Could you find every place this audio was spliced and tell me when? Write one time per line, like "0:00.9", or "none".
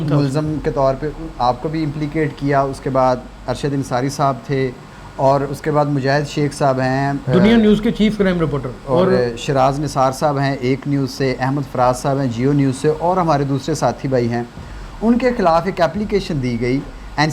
0:04.9